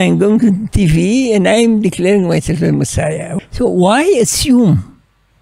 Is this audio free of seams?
no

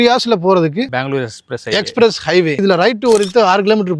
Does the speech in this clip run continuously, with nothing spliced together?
no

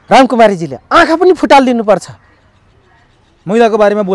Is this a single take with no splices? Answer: yes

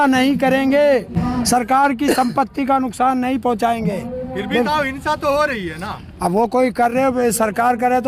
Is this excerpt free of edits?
yes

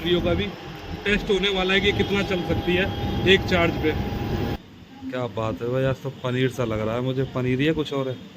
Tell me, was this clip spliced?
yes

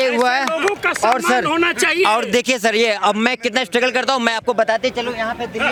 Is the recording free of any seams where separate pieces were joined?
yes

